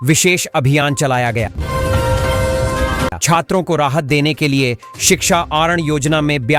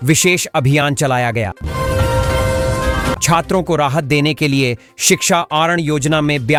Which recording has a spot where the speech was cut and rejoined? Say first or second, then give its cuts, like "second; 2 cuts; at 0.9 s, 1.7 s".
first; 2 cuts; at 1.6 s, 3.2 s